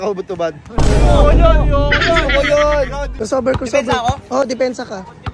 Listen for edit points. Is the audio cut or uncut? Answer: cut